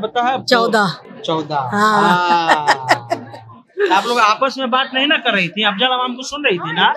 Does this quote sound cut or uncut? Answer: uncut